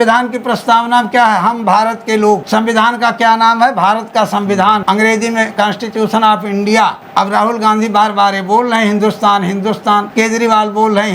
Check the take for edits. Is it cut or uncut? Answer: cut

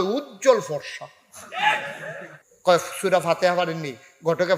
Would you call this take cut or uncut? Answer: cut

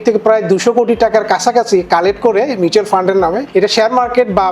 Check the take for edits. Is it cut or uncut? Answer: cut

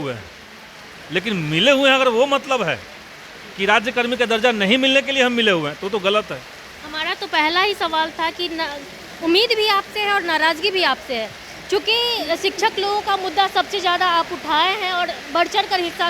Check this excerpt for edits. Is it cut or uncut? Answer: uncut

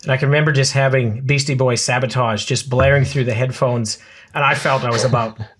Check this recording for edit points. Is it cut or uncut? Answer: uncut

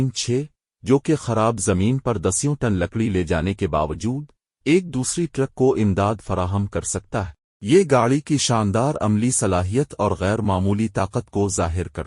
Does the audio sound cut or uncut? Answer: cut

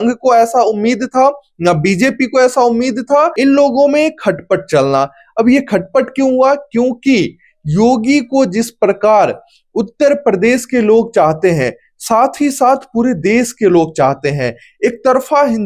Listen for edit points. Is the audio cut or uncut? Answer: cut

